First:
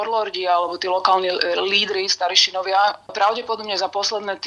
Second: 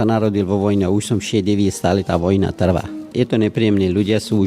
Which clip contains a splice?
second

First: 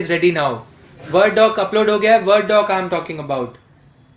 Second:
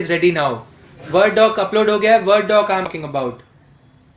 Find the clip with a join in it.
second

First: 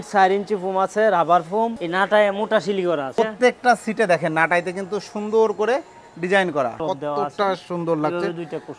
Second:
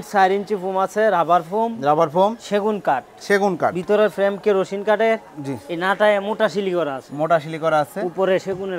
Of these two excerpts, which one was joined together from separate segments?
first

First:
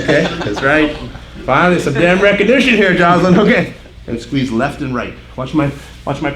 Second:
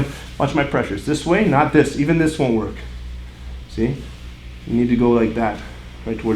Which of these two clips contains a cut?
first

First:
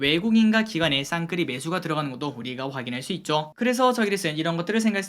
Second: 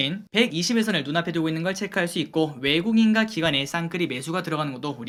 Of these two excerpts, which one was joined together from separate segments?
first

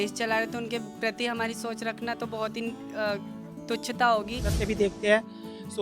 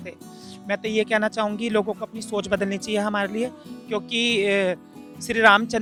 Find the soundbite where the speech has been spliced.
first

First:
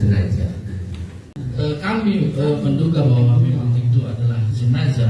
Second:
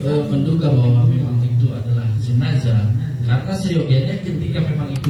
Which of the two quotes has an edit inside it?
first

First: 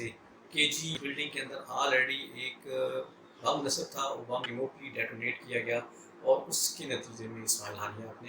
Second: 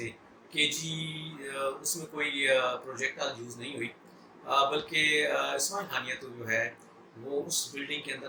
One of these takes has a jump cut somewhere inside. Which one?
first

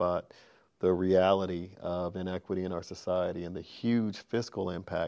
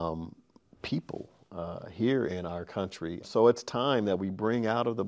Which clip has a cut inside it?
second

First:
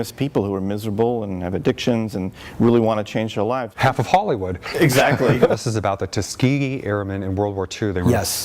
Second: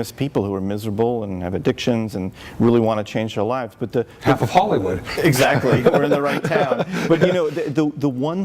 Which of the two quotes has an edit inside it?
first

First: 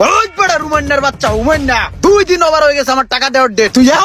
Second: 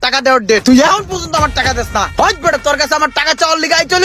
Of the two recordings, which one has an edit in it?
second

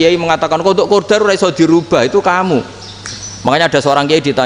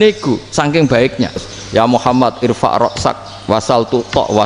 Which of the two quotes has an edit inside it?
second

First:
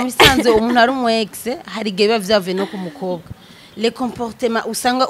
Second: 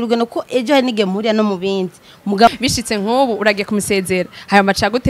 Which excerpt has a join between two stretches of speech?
second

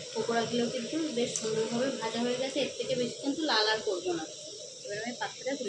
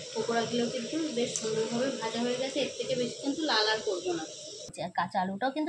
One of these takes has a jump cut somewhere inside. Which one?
second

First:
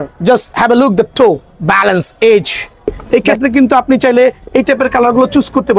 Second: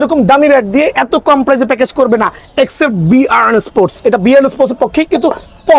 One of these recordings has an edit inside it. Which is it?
first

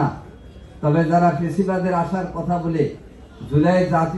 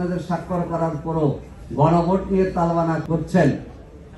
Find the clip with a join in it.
second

